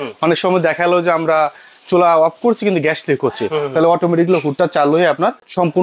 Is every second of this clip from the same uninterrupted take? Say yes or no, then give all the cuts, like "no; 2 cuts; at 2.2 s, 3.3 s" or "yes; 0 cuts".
yes; 0 cuts